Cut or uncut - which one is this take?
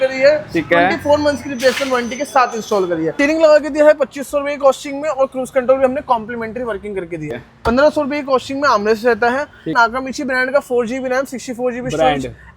cut